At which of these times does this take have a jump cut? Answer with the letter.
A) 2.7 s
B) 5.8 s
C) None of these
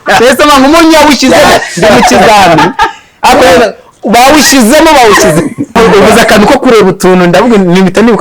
B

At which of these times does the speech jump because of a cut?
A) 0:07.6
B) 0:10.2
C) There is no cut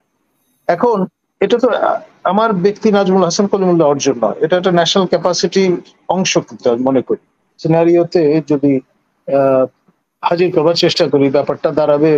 A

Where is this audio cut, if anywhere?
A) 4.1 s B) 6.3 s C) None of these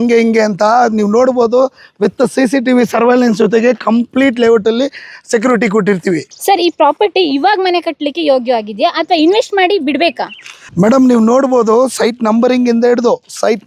C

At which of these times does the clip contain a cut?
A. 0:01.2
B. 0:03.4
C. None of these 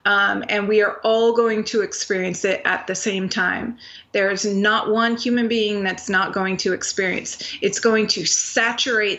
C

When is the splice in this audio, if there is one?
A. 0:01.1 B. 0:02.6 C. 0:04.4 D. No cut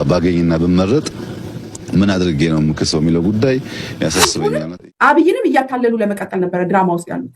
C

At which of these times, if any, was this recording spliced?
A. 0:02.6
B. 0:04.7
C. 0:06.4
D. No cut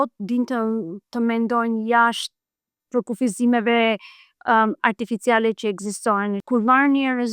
C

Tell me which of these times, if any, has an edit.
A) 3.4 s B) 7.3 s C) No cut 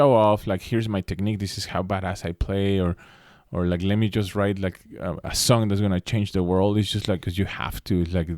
B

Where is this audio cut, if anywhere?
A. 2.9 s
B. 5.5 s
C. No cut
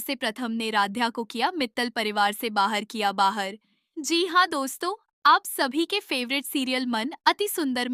C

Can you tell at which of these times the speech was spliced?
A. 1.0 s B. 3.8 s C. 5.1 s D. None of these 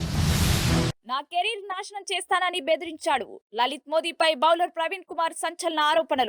A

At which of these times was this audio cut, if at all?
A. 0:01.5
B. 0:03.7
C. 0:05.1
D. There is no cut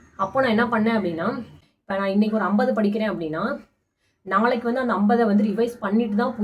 A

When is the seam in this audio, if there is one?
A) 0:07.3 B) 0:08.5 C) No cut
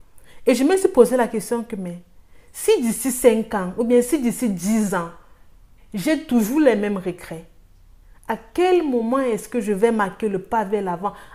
C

